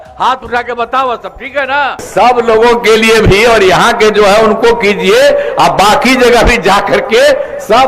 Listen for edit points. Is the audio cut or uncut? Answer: cut